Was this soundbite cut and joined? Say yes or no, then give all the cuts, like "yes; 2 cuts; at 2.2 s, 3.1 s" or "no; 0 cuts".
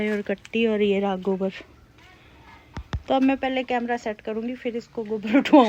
no; 0 cuts